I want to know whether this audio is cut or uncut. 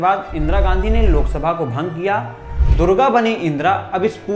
cut